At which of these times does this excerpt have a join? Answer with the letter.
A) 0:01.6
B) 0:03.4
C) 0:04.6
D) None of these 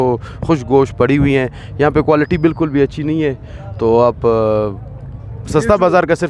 D